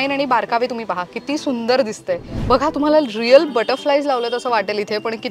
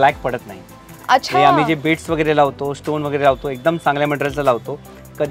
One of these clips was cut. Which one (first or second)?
first